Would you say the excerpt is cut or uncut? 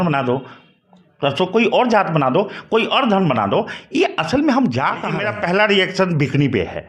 cut